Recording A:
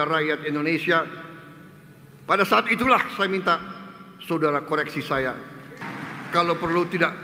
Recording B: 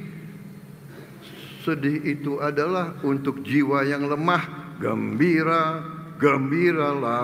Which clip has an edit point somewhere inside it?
A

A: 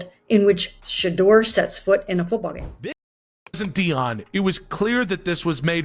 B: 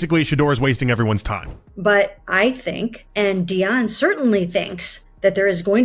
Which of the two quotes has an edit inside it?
A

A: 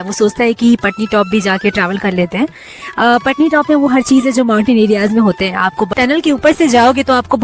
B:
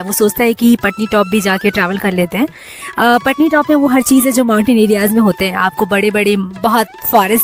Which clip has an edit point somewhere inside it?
A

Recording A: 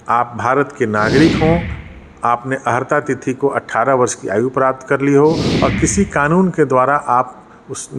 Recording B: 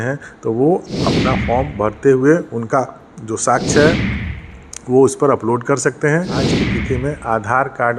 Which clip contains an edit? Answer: B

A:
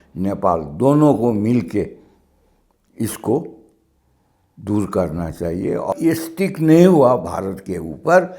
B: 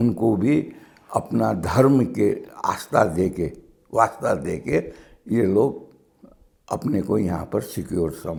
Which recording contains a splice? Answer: A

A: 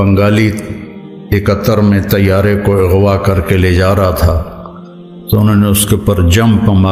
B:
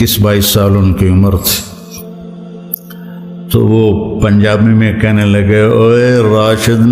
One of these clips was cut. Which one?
B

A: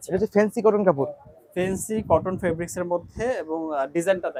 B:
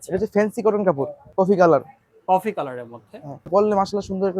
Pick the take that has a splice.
B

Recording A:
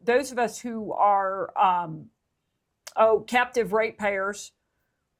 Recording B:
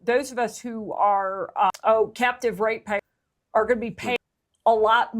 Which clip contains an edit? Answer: B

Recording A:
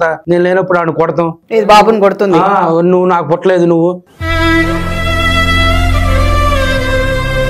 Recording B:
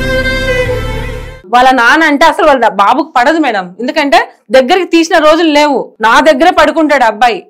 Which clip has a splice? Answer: B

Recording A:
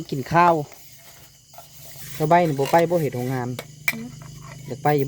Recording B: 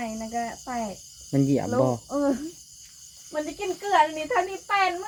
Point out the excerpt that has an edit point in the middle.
A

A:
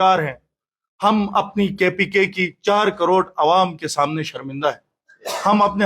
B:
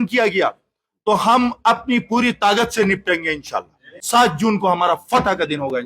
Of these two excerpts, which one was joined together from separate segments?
B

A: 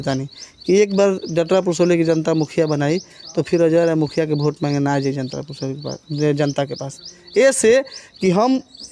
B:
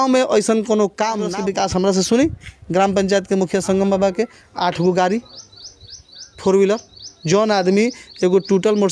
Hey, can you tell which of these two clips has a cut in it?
B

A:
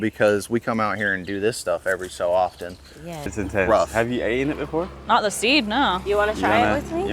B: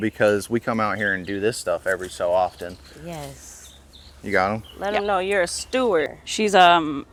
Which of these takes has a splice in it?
A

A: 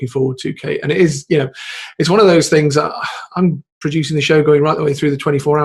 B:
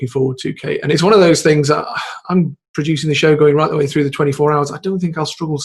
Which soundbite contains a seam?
B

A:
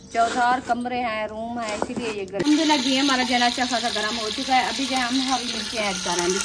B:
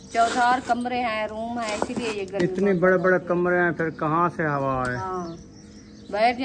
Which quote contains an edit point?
A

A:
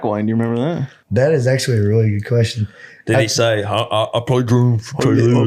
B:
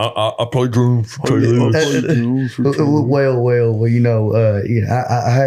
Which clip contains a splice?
A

